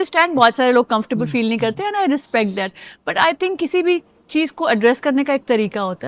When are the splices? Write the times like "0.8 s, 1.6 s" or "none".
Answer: none

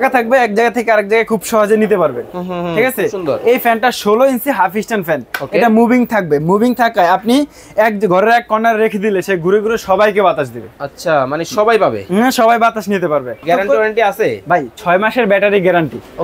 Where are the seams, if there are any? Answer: 13.4 s

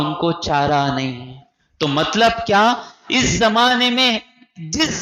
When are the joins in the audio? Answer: none

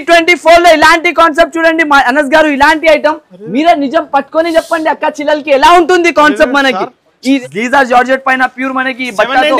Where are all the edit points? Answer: 7.4 s

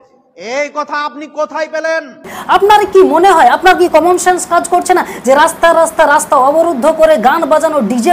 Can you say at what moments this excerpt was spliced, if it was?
2.3 s

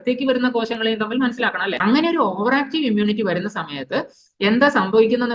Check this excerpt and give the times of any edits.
1.8 s

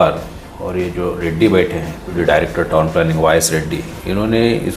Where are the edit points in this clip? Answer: 2.2 s

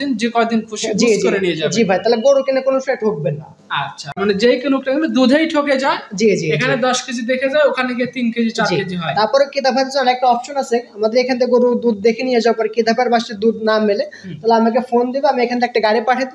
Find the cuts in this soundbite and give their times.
4.2 s

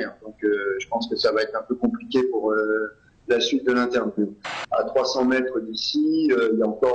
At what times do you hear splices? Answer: 4.5 s

